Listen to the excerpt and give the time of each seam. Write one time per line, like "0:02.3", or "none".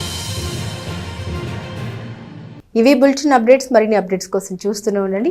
none

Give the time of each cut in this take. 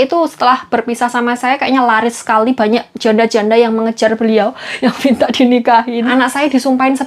0:04.6
0:06.0

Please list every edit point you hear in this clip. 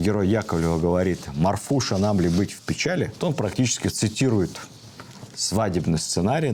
none

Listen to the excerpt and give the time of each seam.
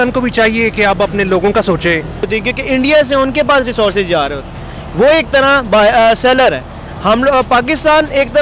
0:02.3

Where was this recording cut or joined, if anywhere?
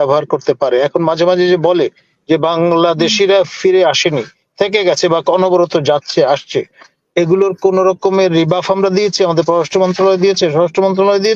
none

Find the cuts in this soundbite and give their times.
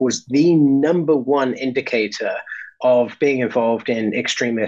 none

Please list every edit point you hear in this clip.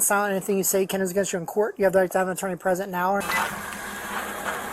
0:03.2

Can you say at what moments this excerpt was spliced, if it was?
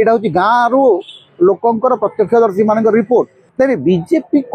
0:03.4

